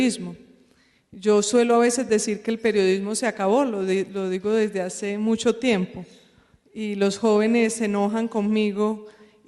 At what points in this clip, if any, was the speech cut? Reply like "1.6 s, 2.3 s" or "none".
6.9 s